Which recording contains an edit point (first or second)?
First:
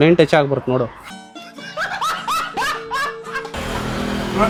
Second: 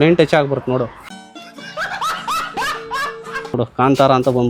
second